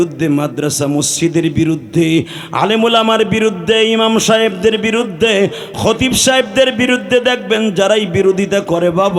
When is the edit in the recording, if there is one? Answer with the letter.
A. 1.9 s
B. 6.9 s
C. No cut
C